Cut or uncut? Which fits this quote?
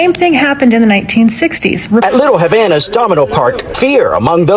cut